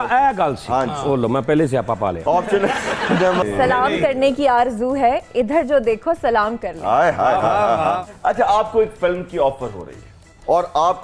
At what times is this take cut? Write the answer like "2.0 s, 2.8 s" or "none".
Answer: 3.4 s